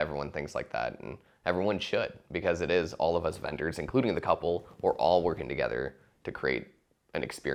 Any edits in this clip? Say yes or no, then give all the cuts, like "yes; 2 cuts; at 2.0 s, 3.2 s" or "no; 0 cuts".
no; 0 cuts